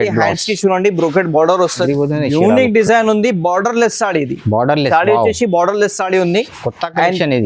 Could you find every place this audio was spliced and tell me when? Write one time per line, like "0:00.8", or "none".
0:01.8